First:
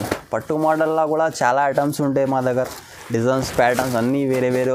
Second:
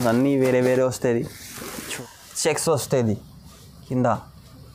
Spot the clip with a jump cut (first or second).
second